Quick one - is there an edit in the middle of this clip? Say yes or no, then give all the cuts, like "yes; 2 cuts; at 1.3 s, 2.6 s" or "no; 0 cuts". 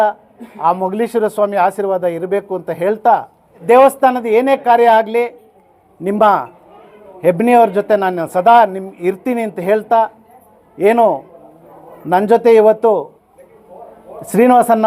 yes; 1 cut; at 3.6 s